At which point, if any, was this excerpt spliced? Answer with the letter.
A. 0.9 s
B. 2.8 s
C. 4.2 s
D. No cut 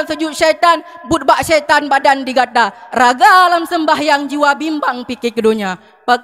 D